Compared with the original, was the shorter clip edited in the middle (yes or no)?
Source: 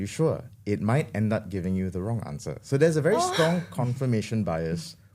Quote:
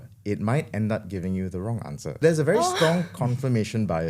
yes